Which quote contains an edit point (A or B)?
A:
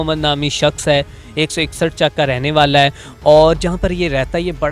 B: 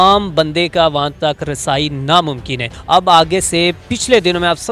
B